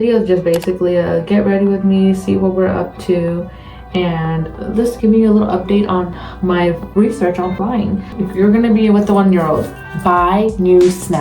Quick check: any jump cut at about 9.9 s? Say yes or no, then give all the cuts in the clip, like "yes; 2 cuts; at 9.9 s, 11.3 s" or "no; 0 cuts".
no; 1 cut; at 8.1 s